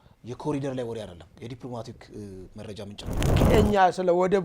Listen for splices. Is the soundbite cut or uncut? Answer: cut